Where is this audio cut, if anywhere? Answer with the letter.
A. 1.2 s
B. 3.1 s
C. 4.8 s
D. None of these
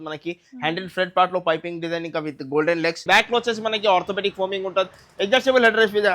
B